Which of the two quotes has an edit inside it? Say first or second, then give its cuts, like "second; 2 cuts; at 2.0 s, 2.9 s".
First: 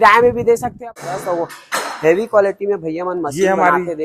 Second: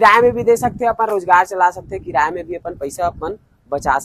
first; 1 cut; at 1.1 s